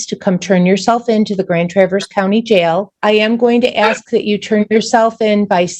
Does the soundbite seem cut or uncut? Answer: cut